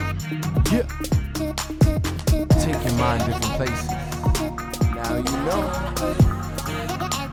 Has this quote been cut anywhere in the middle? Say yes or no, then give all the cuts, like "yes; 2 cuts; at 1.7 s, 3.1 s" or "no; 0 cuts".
no; 0 cuts